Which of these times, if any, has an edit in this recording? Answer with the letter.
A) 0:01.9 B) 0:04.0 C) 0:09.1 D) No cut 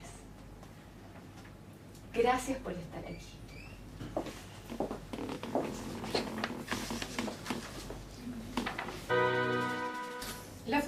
D